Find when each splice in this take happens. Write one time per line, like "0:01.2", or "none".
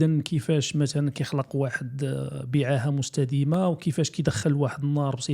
none